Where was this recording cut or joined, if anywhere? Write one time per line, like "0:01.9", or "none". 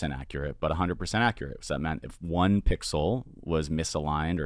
none